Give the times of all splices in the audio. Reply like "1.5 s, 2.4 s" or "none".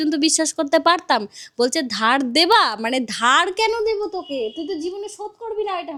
none